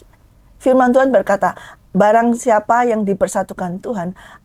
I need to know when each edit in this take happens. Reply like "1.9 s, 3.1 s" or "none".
none